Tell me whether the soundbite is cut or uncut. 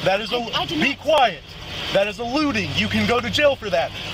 uncut